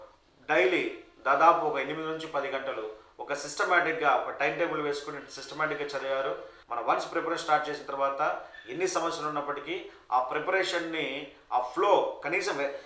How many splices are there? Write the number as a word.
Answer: one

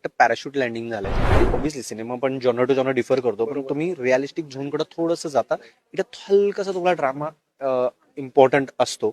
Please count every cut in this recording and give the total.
one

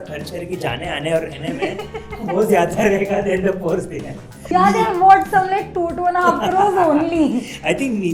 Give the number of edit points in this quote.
one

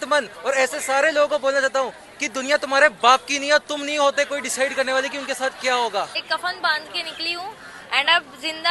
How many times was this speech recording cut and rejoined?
one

